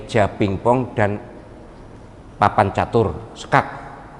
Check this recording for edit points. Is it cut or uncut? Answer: uncut